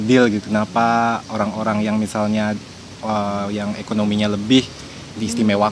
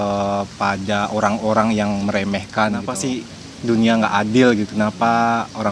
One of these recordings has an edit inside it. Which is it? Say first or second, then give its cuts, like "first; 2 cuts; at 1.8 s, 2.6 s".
second; 1 cut; at 2.9 s